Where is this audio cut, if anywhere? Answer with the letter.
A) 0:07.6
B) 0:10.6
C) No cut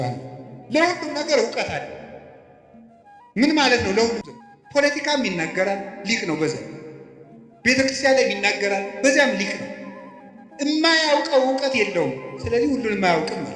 C